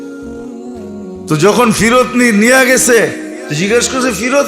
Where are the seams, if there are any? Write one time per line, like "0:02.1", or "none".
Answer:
0:01.3